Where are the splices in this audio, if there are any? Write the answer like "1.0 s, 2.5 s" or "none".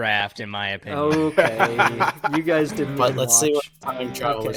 none